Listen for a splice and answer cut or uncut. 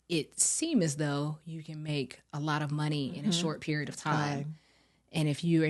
uncut